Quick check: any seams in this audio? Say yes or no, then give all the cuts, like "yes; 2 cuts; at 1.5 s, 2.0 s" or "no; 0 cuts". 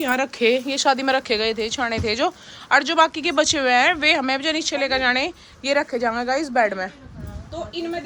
no; 0 cuts